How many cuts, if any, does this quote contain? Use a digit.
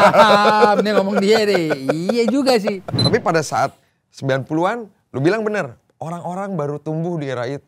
1